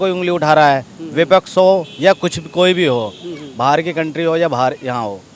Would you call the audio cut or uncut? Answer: uncut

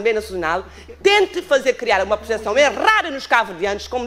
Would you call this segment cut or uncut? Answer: uncut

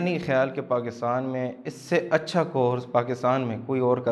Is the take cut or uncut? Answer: uncut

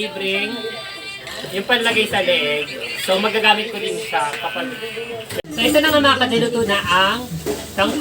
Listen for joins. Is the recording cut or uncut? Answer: cut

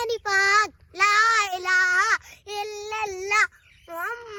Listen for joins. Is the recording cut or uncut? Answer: uncut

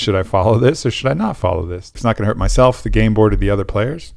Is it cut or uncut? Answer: cut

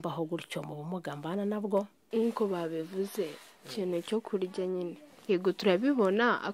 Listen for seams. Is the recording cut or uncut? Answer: cut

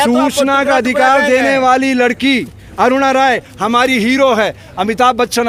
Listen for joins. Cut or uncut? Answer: uncut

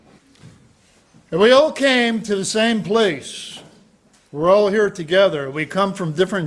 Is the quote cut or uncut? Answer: cut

